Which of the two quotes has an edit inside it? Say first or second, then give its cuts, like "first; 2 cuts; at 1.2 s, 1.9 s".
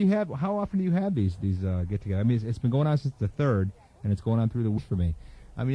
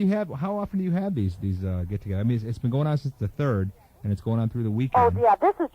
second; 1 cut; at 4.8 s